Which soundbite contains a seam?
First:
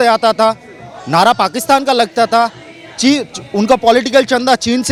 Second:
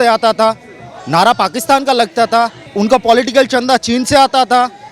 second; 1 cut; at 2.6 s

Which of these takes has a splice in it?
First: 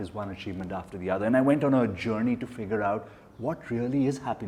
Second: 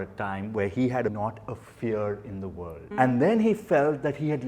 second; 2 cuts; at 1.1 s, 2.8 s

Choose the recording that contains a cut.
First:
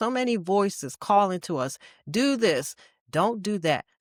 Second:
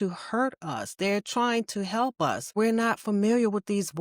second; 1 cut; at 2.5 s

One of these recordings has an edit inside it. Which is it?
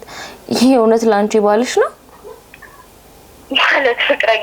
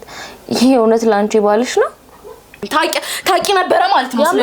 second; 1 cut; at 2.6 s

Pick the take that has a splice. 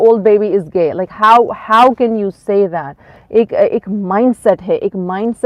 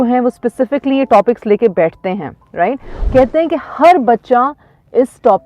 second; 1 cut; at 2.9 s

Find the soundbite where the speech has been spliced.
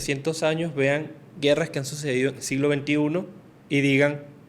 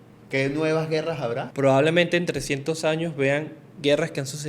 second; 1 cut; at 1.5 s

